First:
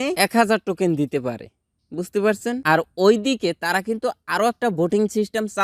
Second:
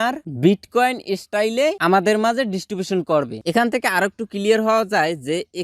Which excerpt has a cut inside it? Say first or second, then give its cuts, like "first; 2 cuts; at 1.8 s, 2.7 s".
second; 1 cut; at 3.4 s